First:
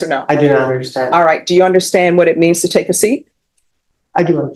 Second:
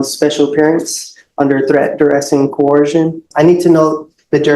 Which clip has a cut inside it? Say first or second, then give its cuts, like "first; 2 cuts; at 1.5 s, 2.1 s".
second; 1 cut; at 3.3 s